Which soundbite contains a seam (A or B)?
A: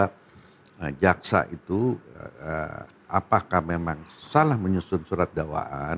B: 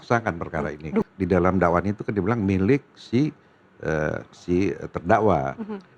B